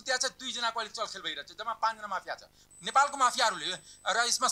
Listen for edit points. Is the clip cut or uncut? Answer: cut